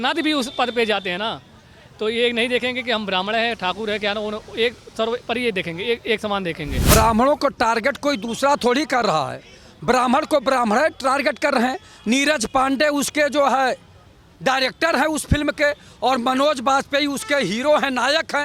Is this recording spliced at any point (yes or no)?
yes